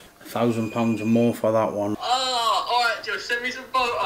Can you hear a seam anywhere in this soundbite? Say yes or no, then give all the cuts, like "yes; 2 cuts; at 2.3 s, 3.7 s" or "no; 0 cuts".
yes; 1 cut; at 1.9 s